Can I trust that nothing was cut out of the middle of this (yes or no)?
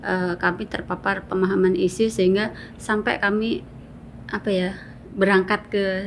yes